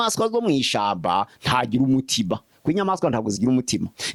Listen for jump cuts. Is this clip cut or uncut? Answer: uncut